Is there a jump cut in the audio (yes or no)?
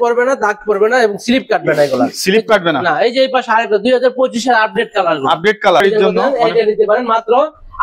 yes